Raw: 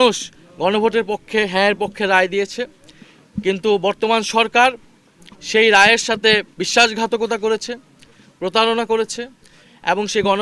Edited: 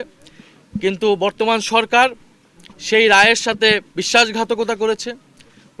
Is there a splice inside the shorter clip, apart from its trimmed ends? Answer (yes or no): no